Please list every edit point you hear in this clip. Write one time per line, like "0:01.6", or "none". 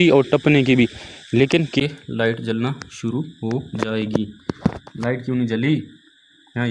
0:01.8